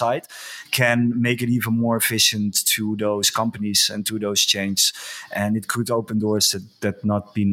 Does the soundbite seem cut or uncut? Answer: uncut